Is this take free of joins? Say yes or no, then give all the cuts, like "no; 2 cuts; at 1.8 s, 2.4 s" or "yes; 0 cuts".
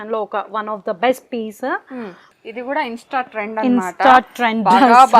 no; 1 cut; at 2.2 s